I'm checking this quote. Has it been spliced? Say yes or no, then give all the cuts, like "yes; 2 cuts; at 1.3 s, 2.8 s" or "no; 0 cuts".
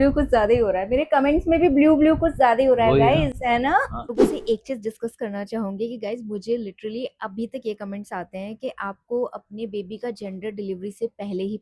no; 0 cuts